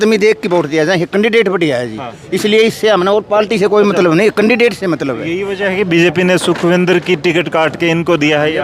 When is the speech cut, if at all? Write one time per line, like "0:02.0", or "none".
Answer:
none